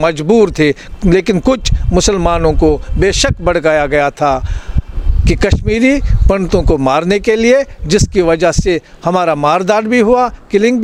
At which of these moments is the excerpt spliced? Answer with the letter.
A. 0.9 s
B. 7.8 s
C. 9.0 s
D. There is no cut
D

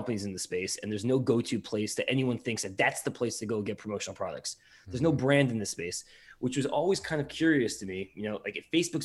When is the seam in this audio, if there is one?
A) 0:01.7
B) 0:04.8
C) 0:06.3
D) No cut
D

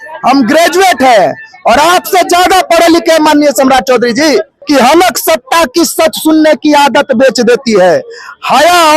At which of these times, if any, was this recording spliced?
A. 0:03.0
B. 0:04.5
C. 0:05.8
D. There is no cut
B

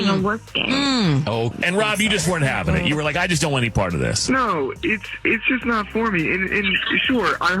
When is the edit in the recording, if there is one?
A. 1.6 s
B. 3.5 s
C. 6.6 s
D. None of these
A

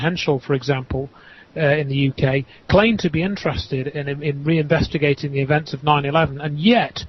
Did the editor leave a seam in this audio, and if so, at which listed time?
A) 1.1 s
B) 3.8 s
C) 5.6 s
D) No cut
C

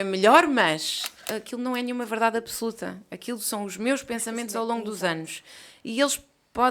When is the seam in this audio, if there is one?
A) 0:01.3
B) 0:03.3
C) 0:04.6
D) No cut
A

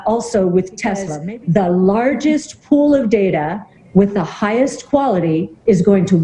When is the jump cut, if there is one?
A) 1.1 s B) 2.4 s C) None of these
A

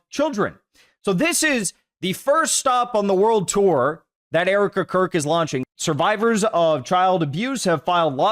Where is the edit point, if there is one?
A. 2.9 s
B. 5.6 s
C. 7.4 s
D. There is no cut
B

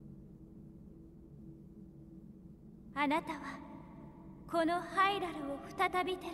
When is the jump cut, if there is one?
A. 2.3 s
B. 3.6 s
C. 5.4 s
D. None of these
A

